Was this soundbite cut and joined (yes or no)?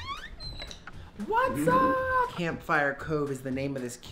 yes